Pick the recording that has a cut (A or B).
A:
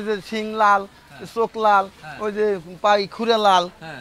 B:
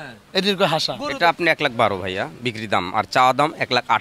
B